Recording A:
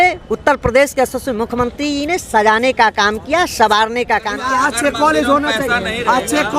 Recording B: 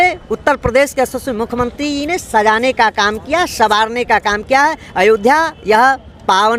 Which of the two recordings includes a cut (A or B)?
A